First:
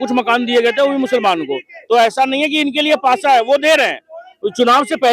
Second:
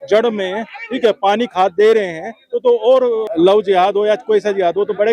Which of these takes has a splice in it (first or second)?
second